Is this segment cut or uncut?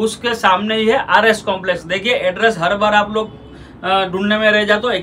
uncut